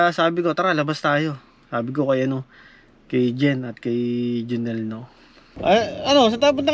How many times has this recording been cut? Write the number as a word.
one